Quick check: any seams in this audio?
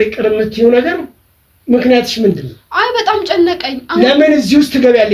no; 0 cuts

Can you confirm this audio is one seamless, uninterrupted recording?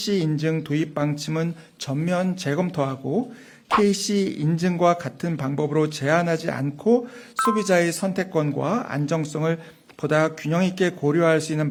yes; 0 cuts

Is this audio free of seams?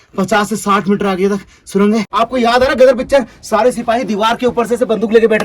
no; 1 cut; at 2.1 s

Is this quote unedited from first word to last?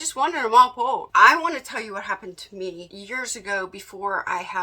no; 2 cuts; at 1.1 s, 2.9 s

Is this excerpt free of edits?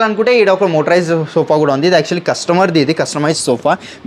yes; 0 cuts

